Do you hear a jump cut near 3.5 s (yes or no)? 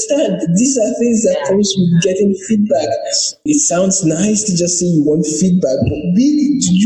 yes